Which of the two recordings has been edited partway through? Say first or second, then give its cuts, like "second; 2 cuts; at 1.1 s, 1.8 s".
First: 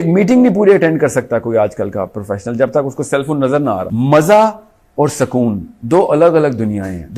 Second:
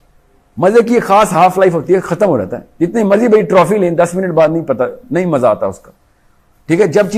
first; 1 cut; at 3.9 s